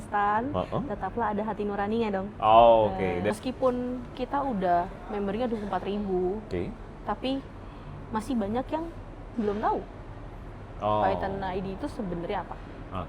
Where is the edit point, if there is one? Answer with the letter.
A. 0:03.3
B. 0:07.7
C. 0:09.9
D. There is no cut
A